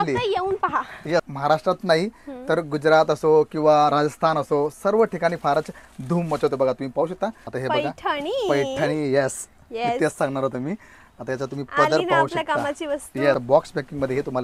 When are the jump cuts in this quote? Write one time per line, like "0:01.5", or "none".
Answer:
0:01.3
0:07.5
0:13.4